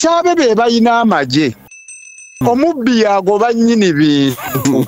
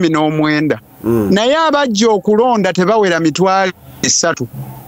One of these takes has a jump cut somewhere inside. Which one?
first; 1 cut; at 1.8 s

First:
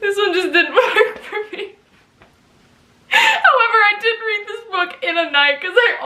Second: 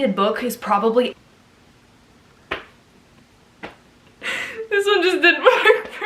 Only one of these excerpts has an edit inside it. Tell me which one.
second; 1 cut; at 1.1 s

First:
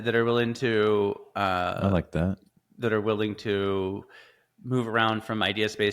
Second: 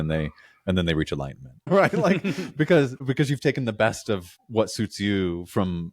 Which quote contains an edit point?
second; 3 cuts; at 1.7 s, 3.0 s, 4.4 s

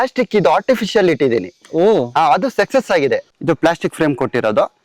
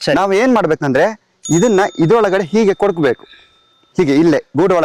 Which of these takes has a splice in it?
first; 1 cut; at 3.3 s

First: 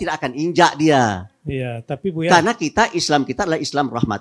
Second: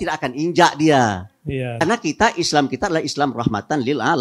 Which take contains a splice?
second; 1 cut; at 1.8 s

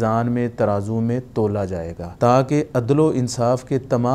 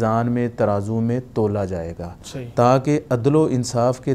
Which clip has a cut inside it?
first; 1 cut; at 2.0 s

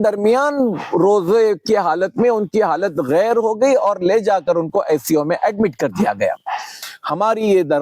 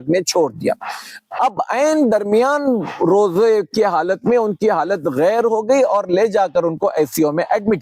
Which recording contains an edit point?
first; 1 cut; at 6.8 s

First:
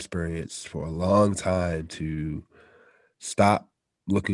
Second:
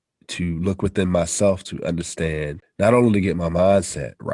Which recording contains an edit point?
second; 1 cut; at 2.6 s

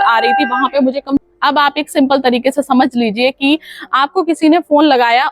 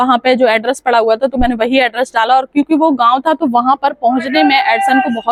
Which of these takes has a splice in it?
first; 1 cut; at 1.3 s

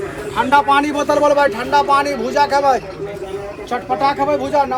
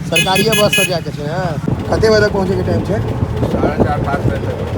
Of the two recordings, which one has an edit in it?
second; 1 cut; at 1.7 s

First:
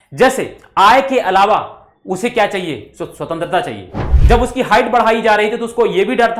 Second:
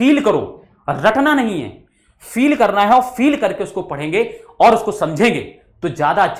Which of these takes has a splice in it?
first; 1 cut; at 4.1 s

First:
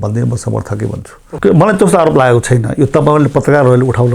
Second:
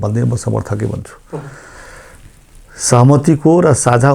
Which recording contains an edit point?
first; 1 cut; at 1.3 s

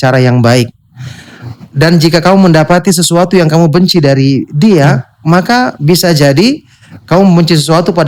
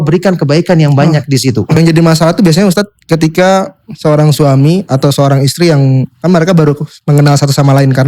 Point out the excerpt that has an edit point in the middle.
second; 1 cut; at 1.8 s

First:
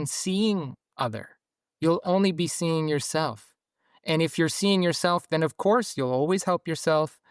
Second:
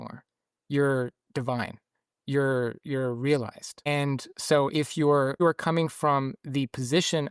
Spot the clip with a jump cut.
second; 2 cuts; at 3.9 s, 5.4 s

